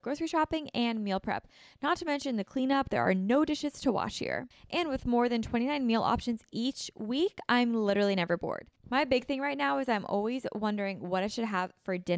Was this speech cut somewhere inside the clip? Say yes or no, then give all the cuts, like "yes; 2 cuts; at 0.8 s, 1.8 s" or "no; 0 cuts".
yes; 2 cuts; at 4.5 s, 8.7 s